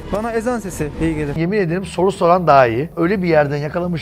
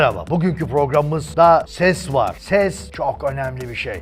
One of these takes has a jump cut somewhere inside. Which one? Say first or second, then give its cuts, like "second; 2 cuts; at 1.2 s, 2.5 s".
first; 2 cuts; at 1.3 s, 2.9 s